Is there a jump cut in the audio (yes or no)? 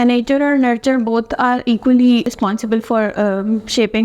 yes